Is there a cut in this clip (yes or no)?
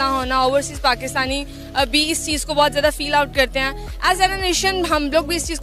no